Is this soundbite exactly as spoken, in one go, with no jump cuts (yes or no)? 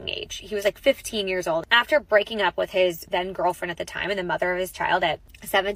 no